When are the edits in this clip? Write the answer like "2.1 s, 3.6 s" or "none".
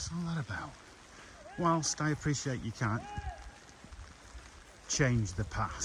none